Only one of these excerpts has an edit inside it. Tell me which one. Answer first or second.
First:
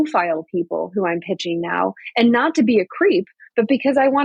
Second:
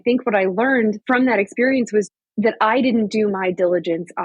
second